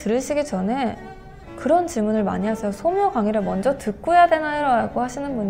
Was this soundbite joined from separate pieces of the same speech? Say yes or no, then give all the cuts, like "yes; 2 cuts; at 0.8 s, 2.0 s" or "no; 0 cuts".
no; 0 cuts